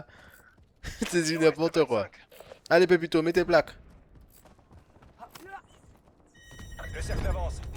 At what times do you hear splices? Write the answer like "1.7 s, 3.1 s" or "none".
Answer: none